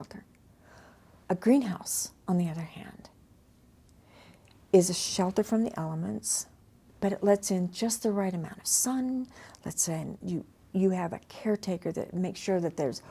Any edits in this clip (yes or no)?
no